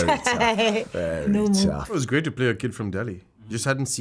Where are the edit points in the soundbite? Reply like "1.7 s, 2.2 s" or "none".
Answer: 1.8 s